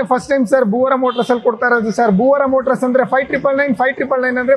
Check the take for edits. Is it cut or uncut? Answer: uncut